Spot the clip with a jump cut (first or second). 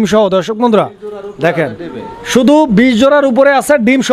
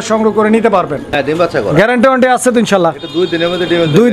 second